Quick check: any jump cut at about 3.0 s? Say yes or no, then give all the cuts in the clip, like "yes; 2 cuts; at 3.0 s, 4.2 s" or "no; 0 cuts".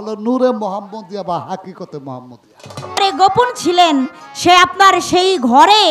yes; 1 cut; at 3.0 s